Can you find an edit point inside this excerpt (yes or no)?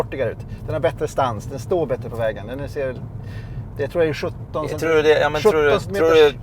no